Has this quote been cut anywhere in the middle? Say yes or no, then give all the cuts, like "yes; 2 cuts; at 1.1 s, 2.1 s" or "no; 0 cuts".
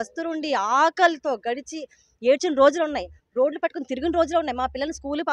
no; 0 cuts